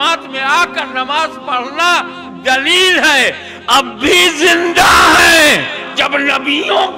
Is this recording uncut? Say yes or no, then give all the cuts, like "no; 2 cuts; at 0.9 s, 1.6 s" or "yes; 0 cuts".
no; 1 cut; at 5.9 s